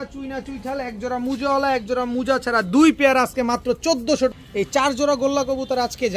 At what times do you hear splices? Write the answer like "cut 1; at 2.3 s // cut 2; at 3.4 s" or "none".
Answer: cut 1; at 4.3 s